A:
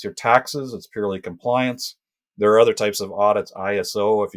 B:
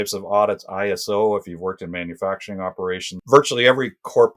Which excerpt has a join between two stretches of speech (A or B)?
B